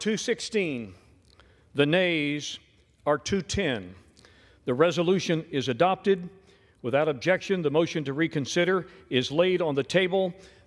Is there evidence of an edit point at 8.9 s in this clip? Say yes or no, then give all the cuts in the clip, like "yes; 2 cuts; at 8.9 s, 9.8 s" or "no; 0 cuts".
no; 0 cuts